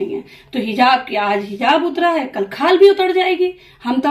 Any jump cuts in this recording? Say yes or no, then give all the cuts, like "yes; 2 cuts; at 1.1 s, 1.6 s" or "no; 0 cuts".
no; 0 cuts